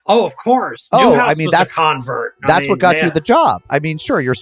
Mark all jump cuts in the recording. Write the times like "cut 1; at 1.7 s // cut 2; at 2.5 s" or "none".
cut 1; at 0.9 s